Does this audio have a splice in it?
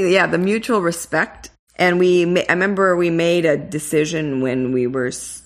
yes; 1 cut; at 1.4 s

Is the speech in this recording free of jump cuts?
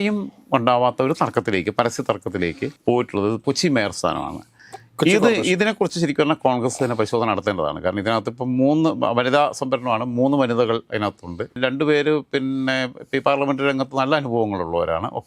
yes; 0 cuts

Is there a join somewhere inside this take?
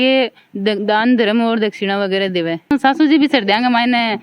yes; 1 cut; at 2.7 s

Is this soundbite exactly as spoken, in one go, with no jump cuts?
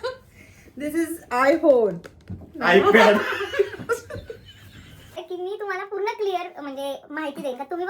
no; 2 cuts; at 2.3 s, 5.2 s

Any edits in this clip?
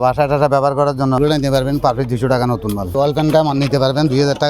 yes; 2 cuts; at 1.2 s, 2.9 s

